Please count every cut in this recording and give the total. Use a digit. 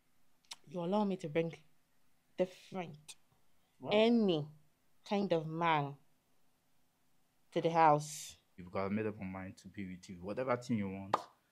1